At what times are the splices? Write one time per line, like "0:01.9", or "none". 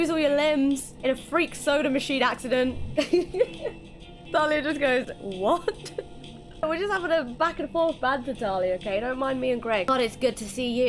0:00.9
0:02.8
0:04.3
0:06.6
0:09.9